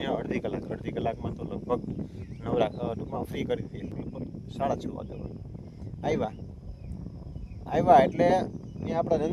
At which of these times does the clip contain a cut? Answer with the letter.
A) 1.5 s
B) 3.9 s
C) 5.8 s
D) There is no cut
B